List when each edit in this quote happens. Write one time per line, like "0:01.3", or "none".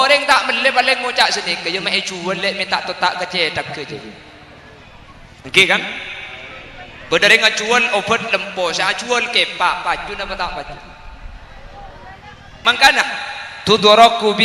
0:12.5